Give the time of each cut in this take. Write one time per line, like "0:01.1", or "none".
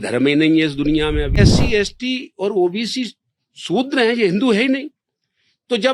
0:01.4